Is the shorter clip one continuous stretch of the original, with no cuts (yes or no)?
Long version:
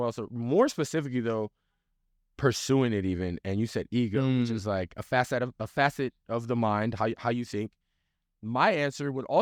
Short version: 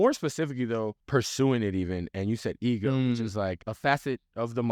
no